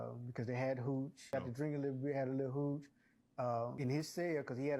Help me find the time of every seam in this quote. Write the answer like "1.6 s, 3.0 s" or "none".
1.3 s, 3.7 s